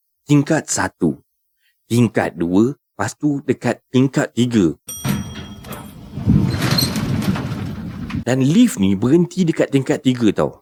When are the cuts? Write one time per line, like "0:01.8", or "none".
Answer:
none